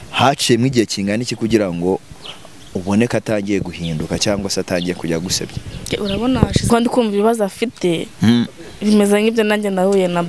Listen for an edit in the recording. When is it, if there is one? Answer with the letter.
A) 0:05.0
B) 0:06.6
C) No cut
B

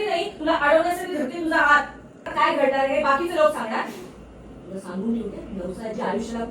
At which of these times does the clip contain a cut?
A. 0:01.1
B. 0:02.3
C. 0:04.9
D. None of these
B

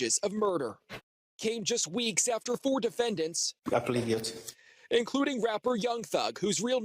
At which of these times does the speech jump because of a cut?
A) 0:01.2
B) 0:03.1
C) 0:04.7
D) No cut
A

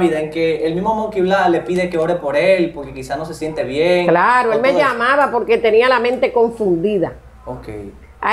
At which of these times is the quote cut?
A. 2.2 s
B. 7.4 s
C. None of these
C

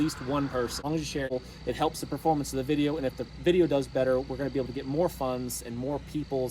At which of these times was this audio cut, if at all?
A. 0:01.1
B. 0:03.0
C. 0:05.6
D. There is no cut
A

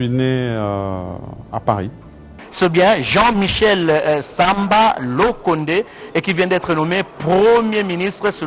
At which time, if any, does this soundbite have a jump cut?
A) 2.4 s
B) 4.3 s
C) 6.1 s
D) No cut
A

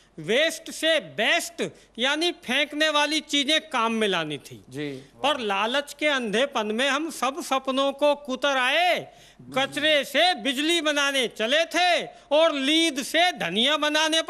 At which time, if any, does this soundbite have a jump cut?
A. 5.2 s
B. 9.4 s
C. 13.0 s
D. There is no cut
D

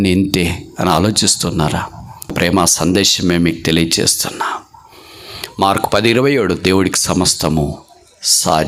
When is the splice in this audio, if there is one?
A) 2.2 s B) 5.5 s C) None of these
C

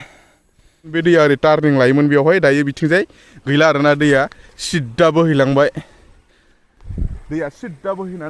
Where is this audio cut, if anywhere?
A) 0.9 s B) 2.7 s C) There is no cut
A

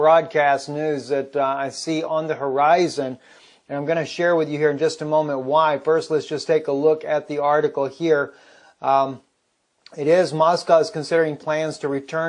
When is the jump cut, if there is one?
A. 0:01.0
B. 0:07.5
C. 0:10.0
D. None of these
D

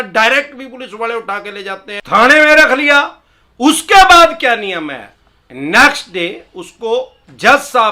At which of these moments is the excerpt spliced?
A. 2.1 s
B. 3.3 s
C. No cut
A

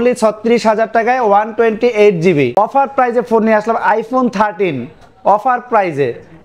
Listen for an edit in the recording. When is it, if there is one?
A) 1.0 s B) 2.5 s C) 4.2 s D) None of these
B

